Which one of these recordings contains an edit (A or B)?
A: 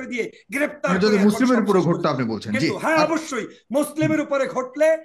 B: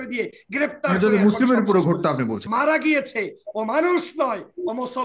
B